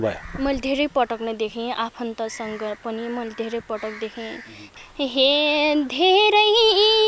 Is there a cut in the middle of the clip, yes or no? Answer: yes